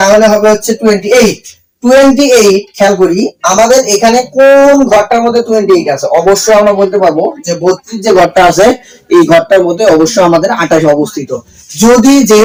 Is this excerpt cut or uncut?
uncut